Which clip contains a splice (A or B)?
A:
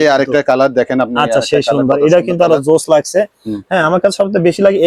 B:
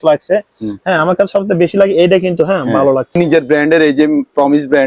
B